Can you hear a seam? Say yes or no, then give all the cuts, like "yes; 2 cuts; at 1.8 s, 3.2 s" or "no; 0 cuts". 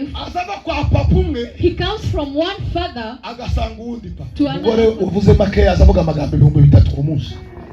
yes; 1 cut; at 4.6 s